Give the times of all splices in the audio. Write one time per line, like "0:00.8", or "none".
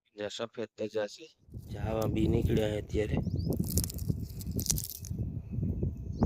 0:01.7